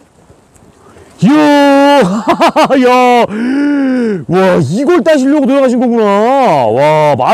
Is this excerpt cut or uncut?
uncut